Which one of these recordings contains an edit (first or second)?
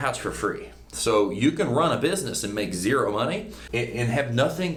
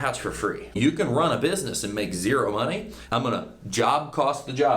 second